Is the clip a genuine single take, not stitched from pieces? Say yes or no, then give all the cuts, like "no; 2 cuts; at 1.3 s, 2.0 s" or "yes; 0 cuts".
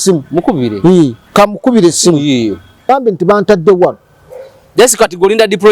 no; 1 cut; at 2.8 s